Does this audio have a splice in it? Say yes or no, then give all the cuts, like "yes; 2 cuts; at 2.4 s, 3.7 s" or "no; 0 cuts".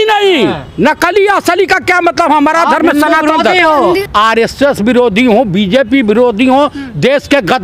yes; 1 cut; at 4.0 s